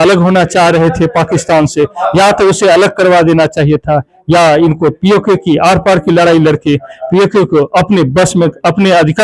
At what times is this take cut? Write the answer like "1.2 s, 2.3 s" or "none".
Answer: none

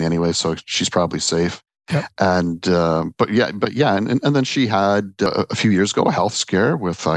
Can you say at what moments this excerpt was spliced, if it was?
5.3 s

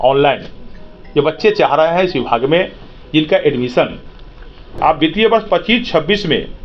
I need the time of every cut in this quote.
4.6 s

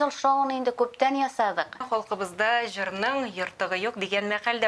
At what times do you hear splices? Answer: 1.8 s

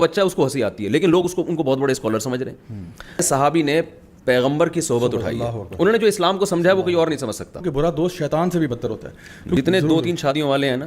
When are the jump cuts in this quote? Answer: 3.2 s, 7.7 s, 9.6 s

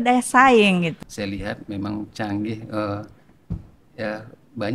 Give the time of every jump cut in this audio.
0.9 s

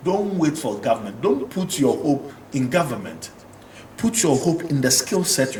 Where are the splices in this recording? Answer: none

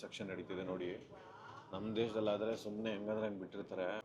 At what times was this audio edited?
none

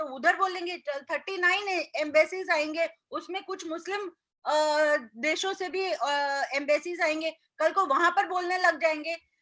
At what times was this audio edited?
none

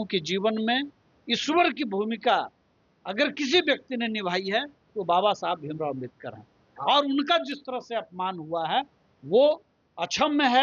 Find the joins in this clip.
none

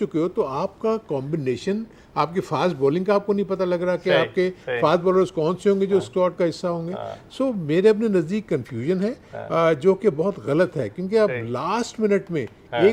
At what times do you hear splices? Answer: none

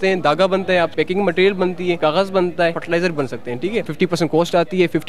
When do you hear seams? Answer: 0.9 s, 2.0 s, 2.8 s, 3.9 s

